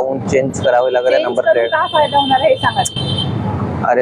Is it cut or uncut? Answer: uncut